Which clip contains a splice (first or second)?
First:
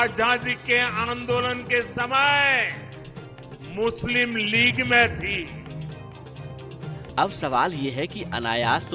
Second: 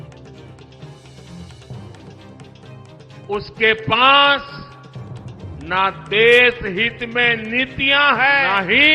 second